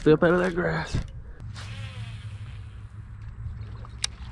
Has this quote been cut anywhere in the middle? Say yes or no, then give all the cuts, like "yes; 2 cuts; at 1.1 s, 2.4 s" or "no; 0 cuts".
yes; 1 cut; at 1.4 s